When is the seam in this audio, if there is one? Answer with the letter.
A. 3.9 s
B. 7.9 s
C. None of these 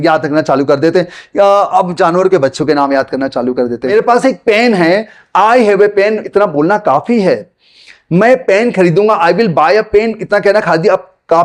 A